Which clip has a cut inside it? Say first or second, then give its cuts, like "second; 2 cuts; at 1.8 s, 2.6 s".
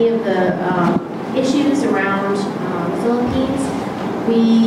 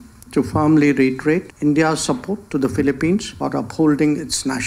second; 2 cuts; at 1.5 s, 3.3 s